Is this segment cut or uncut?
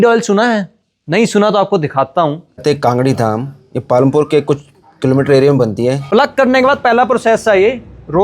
cut